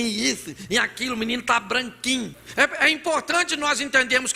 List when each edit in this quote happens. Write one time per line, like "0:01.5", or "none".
0:02.4